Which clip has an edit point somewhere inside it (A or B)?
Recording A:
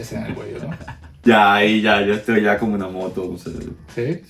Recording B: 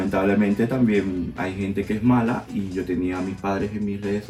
A